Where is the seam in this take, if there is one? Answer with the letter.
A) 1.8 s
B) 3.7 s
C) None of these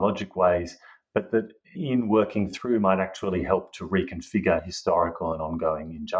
A